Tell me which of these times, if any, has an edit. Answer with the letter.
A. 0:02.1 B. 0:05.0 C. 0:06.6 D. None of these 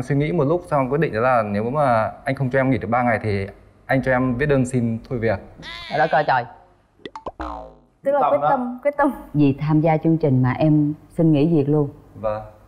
D